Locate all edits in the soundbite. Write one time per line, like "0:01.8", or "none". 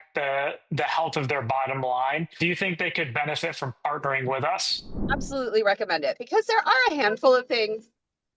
0:02.3
0:05.0